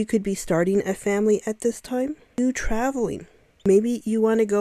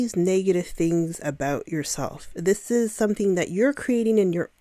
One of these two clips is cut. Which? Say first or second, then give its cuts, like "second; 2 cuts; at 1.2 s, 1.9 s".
first; 2 cuts; at 2.4 s, 3.7 s